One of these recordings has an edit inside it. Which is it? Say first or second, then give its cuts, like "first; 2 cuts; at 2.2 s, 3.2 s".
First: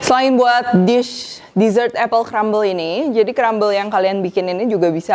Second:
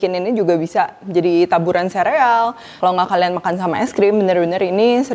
second; 1 cut; at 2.6 s